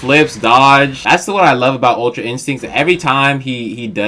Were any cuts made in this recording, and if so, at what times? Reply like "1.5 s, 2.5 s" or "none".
1.0 s